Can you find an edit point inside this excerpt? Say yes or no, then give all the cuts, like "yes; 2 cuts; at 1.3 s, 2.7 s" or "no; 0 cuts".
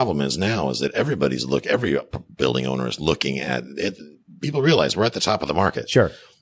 no; 0 cuts